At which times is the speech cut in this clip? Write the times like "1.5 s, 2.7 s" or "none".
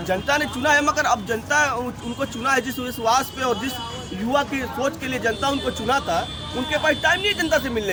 none

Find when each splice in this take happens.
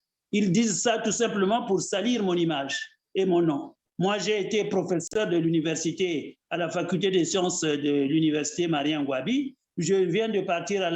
3.7 s

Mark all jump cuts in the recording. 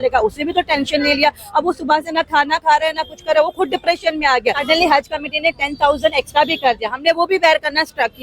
4.6 s

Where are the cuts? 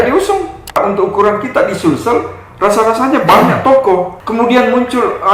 0.8 s, 4.1 s

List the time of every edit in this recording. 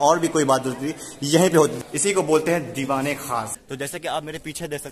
1.8 s, 3.6 s

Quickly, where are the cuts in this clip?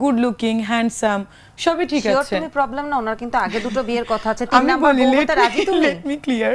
none

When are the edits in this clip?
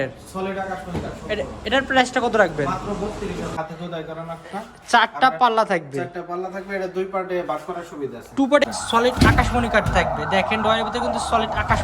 3.6 s, 8.6 s

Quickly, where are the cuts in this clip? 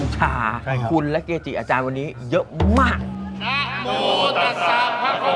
3.1 s

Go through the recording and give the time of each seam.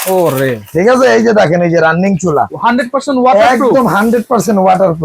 2.5 s

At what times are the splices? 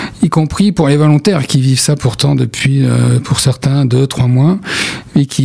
none

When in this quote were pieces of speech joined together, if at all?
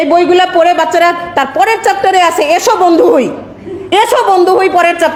none

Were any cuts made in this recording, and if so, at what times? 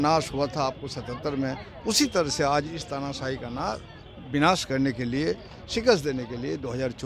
none

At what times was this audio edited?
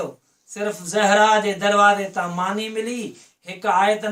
none

